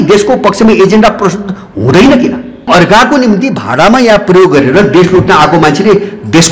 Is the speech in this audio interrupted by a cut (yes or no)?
yes